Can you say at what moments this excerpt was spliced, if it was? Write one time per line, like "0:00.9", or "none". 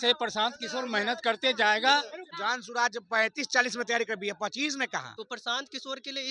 0:02.2
0:05.1